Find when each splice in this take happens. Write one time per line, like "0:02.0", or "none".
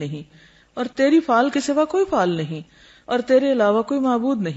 none